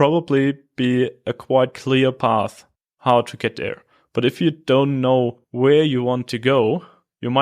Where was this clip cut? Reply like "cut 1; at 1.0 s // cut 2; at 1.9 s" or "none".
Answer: cut 1; at 5.4 s